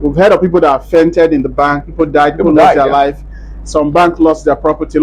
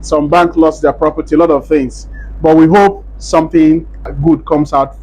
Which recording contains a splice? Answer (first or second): second